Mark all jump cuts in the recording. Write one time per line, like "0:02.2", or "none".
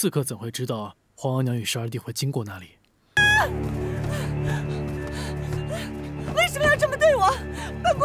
0:03.2